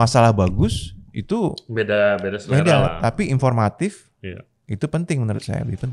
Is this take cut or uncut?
uncut